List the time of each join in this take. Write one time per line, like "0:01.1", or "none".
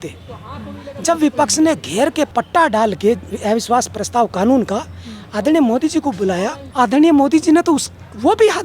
0:02.3
0:06.6